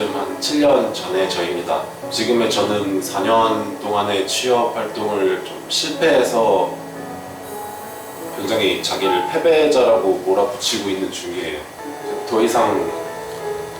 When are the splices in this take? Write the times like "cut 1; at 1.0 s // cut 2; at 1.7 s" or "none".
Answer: cut 1; at 2.0 s // cut 2; at 11.8 s